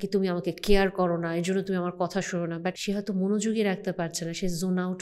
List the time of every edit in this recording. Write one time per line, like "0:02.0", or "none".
0:02.8